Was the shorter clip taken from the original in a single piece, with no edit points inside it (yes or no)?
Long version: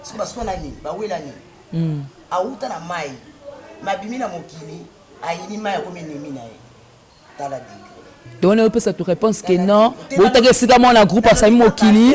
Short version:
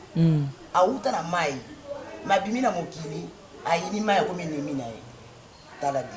yes